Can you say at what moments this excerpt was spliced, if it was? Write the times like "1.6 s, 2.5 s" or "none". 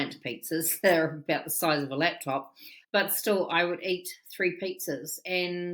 2.8 s

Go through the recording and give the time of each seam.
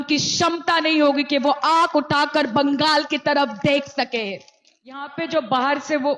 5.1 s

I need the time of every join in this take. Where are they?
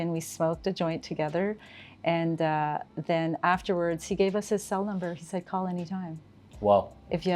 none

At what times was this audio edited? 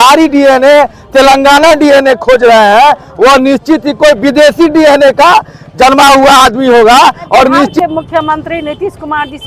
7.7 s

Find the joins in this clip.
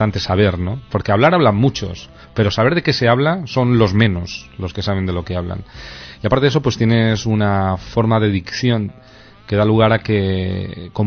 1.2 s

